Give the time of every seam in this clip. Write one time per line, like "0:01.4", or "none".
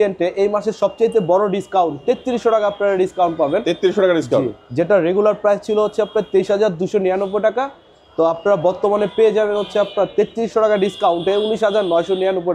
none